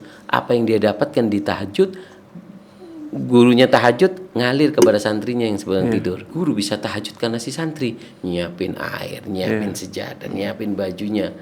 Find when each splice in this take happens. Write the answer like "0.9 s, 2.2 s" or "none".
6.3 s